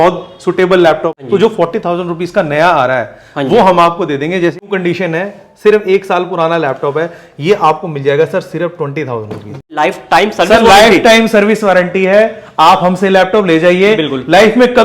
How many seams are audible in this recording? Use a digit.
3